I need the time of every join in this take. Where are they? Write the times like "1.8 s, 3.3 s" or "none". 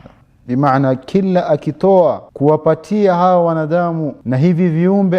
2.3 s, 4.1 s